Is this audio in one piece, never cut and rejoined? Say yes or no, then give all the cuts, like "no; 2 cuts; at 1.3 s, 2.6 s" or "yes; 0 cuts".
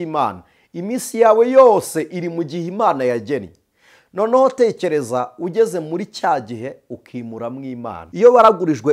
no; 1 cut; at 8.0 s